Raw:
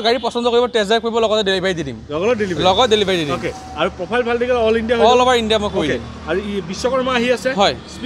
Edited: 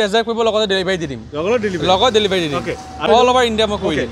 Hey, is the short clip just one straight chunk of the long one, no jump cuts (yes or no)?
no